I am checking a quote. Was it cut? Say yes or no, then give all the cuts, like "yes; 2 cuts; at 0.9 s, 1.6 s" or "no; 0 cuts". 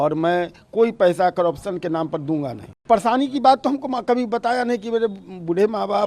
yes; 1 cut; at 2.7 s